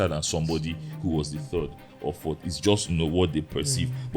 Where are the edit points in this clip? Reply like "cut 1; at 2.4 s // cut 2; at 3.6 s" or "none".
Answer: none